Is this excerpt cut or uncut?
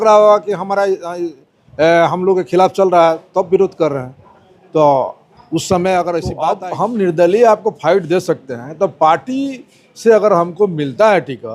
cut